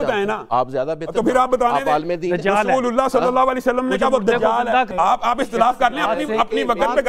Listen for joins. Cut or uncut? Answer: cut